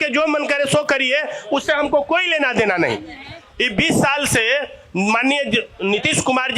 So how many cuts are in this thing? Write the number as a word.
zero